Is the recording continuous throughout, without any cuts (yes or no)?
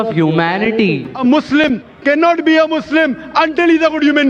no